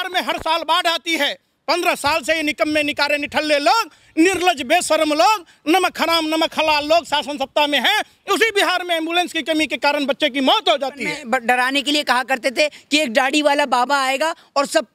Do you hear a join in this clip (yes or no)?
yes